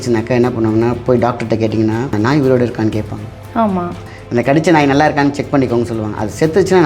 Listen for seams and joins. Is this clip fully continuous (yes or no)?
no